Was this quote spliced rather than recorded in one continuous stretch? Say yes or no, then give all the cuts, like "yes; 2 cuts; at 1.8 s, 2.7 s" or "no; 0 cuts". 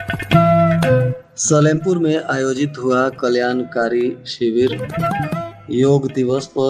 yes; 1 cut; at 1.2 s